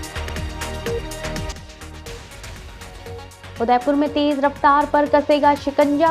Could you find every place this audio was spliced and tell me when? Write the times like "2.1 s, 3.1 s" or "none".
1.1 s